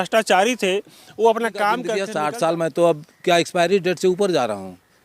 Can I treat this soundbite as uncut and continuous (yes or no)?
no